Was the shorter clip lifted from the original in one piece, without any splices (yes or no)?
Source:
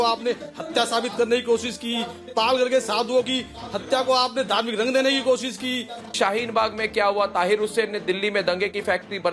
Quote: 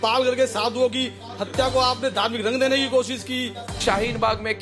yes